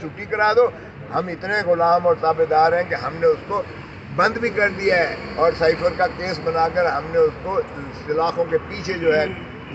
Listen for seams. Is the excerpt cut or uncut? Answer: uncut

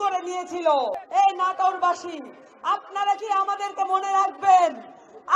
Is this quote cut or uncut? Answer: cut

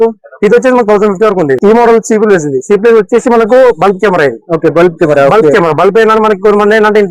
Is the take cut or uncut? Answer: cut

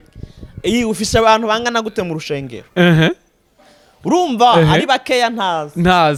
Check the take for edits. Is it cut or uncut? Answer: uncut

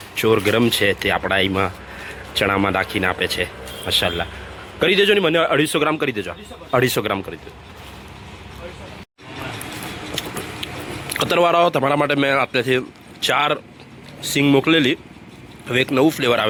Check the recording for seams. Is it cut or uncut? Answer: uncut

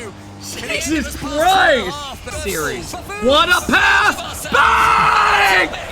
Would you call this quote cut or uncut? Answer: cut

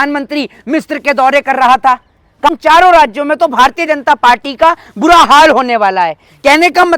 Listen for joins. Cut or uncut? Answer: cut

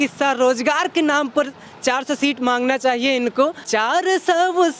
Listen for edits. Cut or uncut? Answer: cut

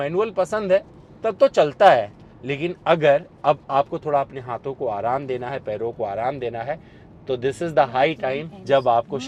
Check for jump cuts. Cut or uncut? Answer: uncut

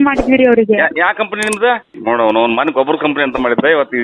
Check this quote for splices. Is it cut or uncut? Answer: cut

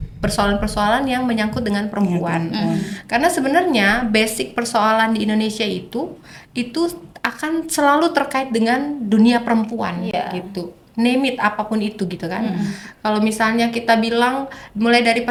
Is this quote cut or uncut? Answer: uncut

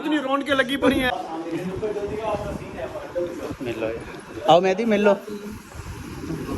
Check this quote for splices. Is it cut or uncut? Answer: cut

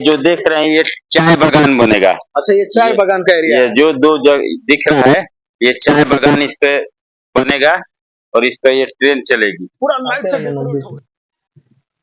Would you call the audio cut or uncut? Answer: cut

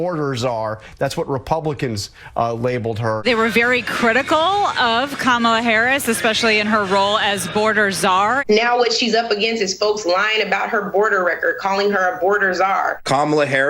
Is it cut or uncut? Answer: cut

